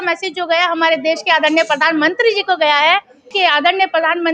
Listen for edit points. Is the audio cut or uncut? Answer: cut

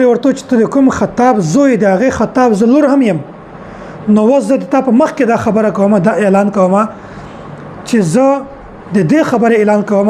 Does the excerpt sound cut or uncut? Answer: uncut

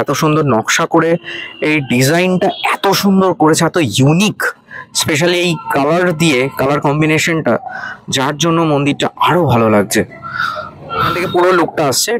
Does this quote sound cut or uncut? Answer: cut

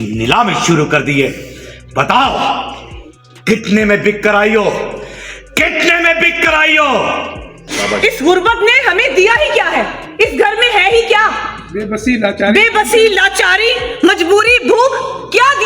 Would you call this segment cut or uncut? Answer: cut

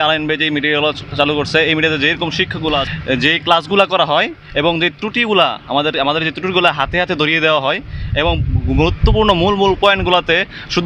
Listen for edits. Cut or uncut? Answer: uncut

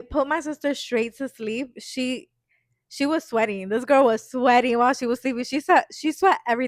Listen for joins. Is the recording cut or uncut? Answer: uncut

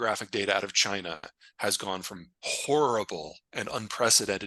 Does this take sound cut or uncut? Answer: uncut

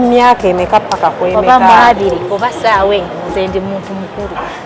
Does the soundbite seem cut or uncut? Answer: uncut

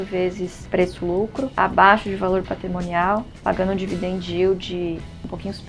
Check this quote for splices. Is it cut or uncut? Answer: uncut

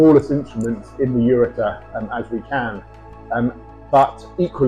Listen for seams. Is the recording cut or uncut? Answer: uncut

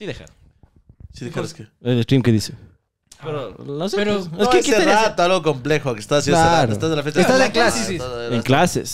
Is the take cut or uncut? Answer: uncut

